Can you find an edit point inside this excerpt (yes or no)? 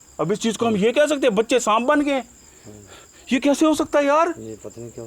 no